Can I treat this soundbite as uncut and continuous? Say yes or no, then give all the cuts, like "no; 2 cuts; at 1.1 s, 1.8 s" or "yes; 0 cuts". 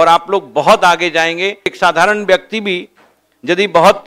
no; 1 cut; at 1.7 s